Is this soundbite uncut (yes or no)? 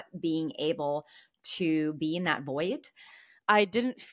no